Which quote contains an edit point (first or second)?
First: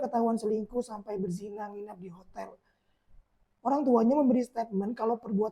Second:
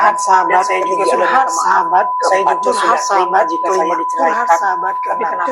first